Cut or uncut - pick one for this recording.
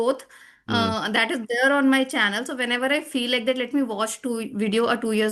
uncut